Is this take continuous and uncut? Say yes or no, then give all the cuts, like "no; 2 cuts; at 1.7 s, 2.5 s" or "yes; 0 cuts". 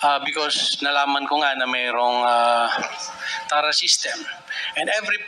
yes; 0 cuts